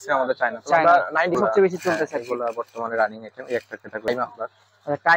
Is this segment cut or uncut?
cut